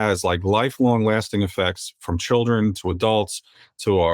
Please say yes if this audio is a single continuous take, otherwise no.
yes